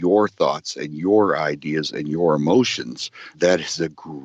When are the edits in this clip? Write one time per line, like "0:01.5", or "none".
0:03.3